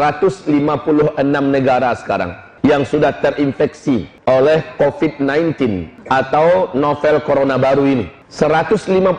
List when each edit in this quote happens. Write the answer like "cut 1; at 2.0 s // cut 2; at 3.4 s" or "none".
cut 1; at 2.4 s // cut 2; at 4.1 s // cut 3; at 5.9 s // cut 4; at 8.2 s